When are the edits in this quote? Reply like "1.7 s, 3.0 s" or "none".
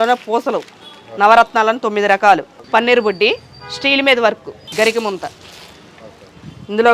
2.5 s, 4.6 s